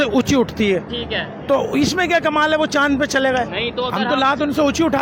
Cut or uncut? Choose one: uncut